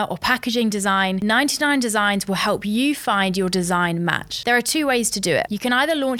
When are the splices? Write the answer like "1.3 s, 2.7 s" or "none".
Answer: none